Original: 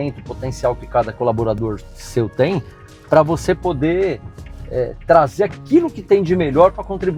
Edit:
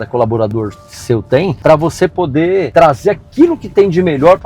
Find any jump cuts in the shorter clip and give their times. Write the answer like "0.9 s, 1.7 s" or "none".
1.6 s, 2.7 s